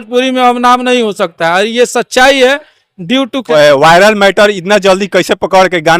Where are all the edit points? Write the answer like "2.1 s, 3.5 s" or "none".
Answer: 3.4 s